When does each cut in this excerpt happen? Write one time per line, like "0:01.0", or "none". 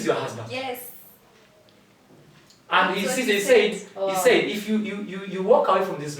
none